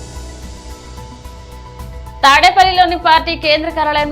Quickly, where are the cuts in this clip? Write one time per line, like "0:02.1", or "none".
0:01.4
0:02.0